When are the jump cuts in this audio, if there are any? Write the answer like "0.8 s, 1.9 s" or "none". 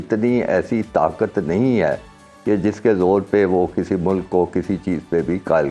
none